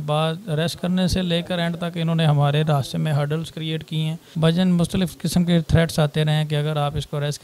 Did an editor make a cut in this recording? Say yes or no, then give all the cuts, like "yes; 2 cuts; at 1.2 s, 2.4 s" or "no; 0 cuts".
yes; 1 cut; at 4.2 s